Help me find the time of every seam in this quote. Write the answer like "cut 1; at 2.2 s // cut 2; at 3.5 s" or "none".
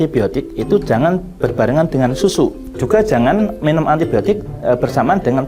cut 1; at 2.7 s